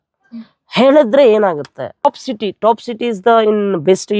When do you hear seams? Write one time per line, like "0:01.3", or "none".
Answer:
0:02.0